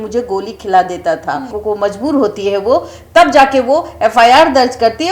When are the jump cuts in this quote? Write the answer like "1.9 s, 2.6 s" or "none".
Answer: 1.5 s